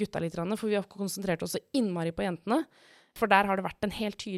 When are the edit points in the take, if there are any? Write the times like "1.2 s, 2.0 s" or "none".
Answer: 3.2 s